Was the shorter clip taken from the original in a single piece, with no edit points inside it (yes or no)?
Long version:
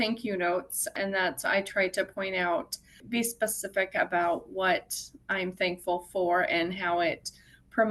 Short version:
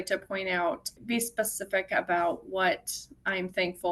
no